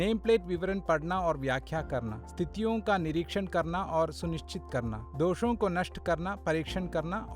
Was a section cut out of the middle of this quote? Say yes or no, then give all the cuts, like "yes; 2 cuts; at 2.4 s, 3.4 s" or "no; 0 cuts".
yes; 2 cuts; at 2.2 s, 5.0 s